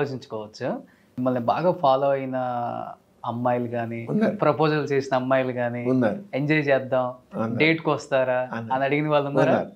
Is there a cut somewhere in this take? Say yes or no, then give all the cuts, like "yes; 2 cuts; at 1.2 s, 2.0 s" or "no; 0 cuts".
yes; 1 cut; at 1.1 s